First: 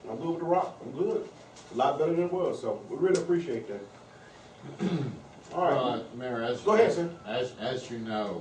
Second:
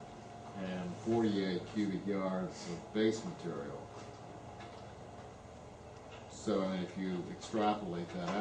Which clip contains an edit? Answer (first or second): second